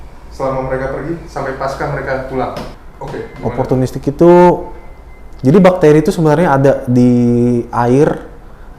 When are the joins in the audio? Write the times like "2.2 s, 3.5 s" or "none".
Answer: 2.7 s

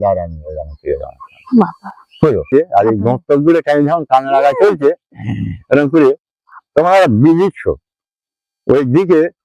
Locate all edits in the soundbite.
2.4 s

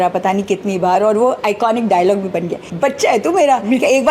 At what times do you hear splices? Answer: 2.6 s

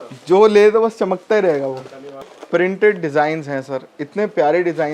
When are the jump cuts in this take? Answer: 2.3 s

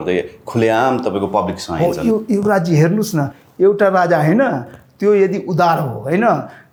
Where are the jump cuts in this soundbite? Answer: none

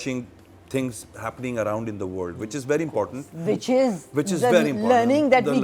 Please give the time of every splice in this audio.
none

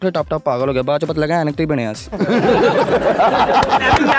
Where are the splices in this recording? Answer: none

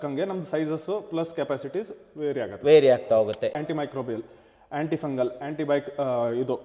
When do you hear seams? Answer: 3.6 s

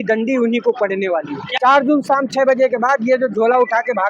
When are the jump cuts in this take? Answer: 1.5 s

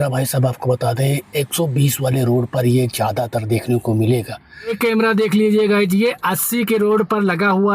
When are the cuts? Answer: 4.7 s

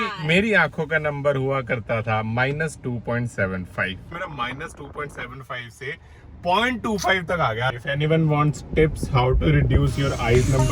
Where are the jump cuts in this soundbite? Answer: 4.2 s, 7.7 s

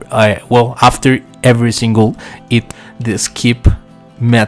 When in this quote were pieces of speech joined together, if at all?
2.7 s

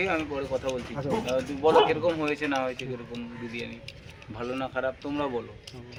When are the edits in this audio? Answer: none

